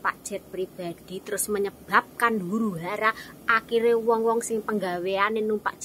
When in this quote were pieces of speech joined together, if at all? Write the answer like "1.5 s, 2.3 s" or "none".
none